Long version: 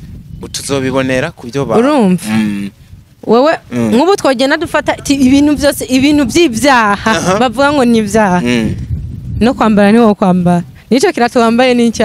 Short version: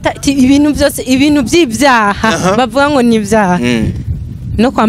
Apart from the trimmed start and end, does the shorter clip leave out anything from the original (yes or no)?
no